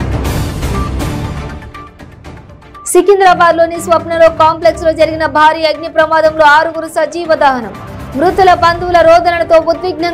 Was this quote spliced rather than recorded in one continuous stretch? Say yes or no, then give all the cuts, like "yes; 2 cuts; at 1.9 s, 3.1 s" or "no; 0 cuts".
yes; 1 cut; at 1.3 s